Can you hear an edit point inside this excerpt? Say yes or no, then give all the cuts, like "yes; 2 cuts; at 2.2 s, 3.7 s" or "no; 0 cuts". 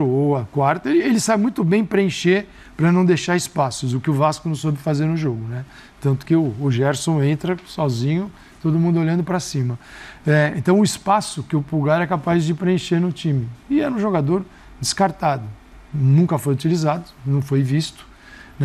no; 0 cuts